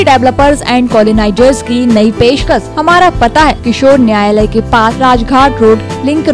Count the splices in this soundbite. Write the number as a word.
three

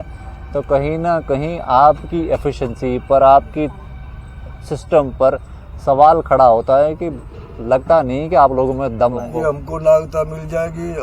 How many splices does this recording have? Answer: one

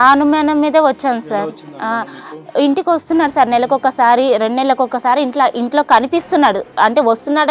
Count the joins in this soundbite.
zero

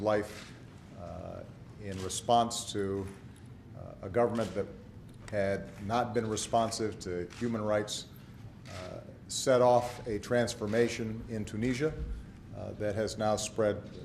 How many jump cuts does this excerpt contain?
one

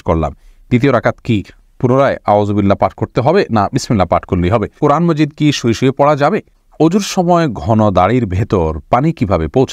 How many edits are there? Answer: two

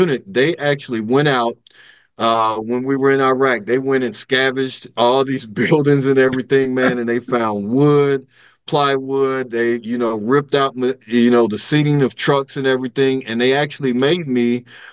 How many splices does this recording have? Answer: zero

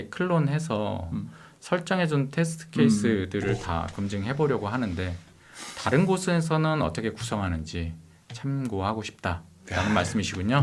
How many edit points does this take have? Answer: zero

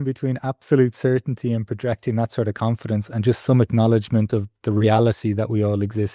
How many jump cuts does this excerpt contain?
zero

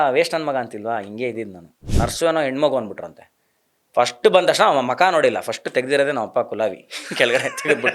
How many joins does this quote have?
one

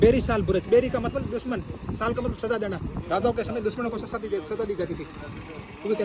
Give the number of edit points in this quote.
zero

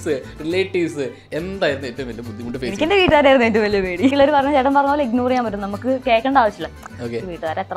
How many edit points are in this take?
three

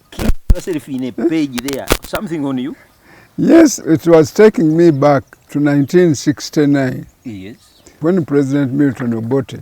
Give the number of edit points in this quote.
three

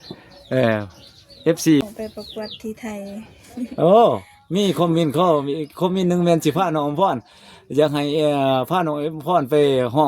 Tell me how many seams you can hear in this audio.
one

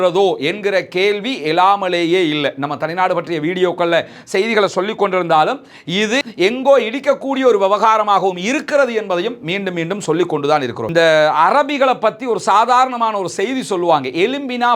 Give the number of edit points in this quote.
one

